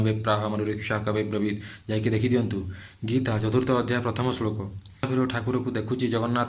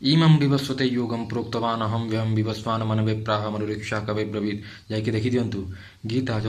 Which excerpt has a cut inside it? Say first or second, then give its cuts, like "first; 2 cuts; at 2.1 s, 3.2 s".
first; 1 cut; at 5.1 s